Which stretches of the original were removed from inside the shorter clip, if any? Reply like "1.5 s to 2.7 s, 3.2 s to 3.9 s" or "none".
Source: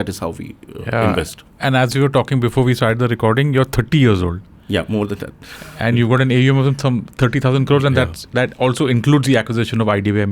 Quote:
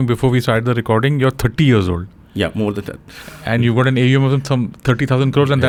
none